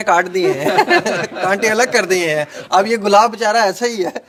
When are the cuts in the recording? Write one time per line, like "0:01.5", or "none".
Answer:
none